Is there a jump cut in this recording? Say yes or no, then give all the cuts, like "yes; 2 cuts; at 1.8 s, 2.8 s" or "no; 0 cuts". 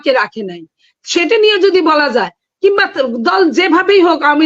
no; 0 cuts